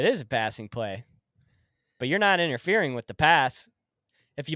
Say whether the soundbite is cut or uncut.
uncut